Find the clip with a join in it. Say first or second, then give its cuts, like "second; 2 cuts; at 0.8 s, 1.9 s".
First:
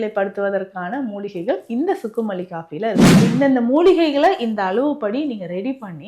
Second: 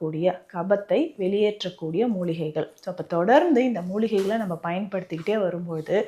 first; 1 cut; at 3.3 s